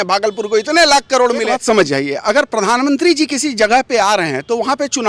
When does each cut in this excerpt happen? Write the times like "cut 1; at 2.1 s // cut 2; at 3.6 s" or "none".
cut 1; at 1.5 s